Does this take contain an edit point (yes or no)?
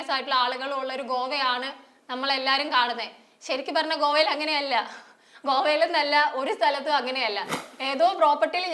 yes